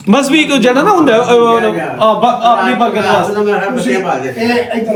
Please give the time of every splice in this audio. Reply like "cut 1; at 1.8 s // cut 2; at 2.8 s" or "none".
none

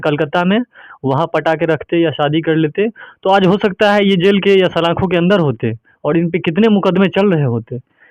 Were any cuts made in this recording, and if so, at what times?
none

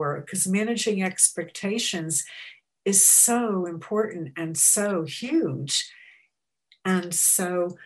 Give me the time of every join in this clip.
none

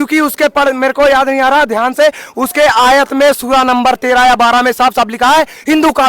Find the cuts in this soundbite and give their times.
none

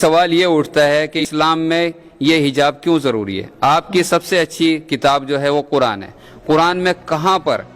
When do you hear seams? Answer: cut 1; at 1.2 s

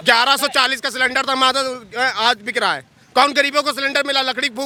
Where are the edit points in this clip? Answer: none

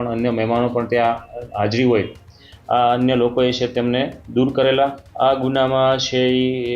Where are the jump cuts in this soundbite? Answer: cut 1; at 5.0 s

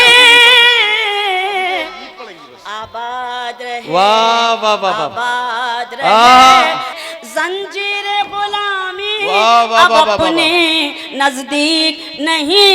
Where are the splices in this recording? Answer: cut 1; at 7.0 s

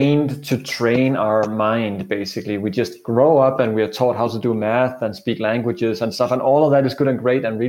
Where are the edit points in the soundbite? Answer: none

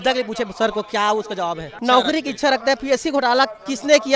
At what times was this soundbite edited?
cut 1; at 1.7 s

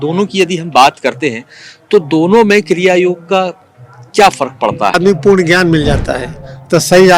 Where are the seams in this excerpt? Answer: cut 1; at 5.0 s

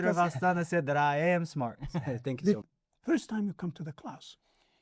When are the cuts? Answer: cut 1; at 2.6 s

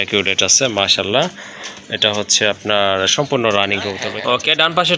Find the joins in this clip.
cut 1; at 4.1 s

